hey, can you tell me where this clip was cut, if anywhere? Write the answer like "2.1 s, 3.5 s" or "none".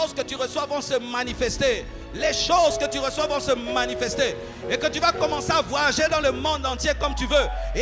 none